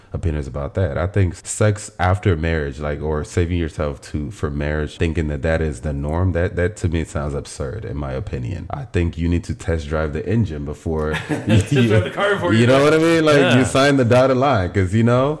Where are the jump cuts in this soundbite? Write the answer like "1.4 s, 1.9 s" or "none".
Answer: 1.4 s, 4.9 s, 8.6 s